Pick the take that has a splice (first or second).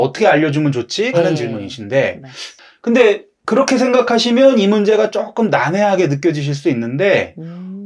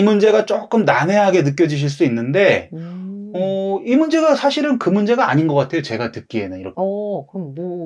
second